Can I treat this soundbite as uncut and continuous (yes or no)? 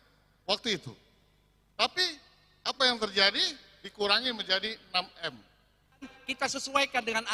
no